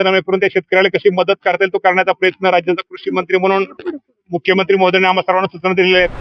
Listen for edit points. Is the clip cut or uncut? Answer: uncut